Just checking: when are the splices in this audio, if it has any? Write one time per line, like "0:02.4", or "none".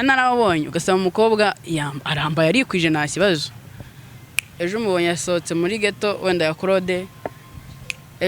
none

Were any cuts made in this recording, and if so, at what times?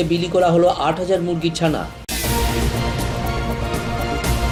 none

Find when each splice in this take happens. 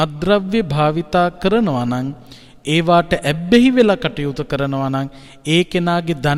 none

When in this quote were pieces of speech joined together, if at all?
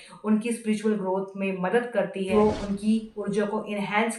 0:02.3

